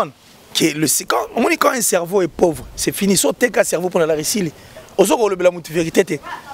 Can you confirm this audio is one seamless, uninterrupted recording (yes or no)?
yes